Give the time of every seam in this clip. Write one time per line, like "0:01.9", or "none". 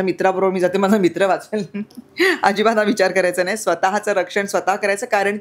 none